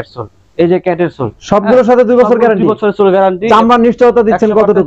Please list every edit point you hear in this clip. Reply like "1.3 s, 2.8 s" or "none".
3.5 s